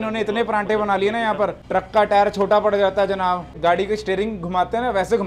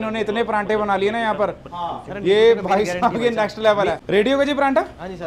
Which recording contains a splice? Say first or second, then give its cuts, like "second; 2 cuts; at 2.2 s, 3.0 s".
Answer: first; 2 cuts; at 1.6 s, 3.5 s